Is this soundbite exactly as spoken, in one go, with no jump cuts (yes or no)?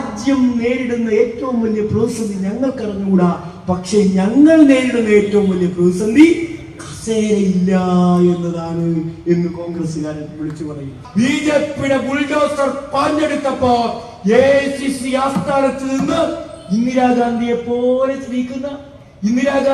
no